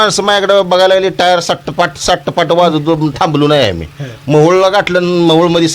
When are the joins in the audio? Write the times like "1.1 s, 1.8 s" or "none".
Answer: none